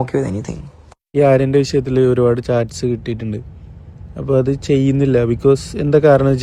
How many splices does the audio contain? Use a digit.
1